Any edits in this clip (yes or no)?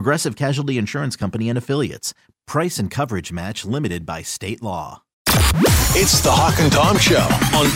yes